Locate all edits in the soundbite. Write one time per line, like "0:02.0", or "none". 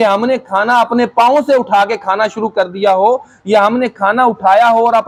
none